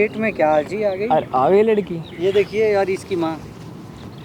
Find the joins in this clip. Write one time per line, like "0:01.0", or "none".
none